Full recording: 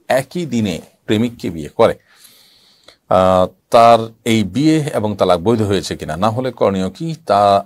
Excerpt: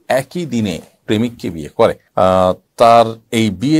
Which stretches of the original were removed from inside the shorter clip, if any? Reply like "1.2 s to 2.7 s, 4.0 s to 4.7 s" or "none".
2.0 s to 3.0 s